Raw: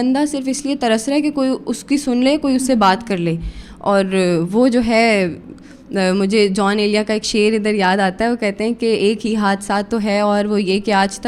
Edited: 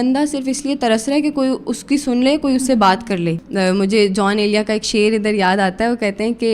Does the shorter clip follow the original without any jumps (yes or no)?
no